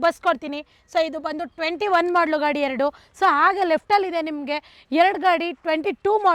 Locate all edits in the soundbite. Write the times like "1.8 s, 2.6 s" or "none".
none